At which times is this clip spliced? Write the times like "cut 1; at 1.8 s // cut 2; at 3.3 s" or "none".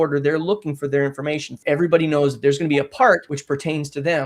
cut 1; at 1.5 s // cut 2; at 3.3 s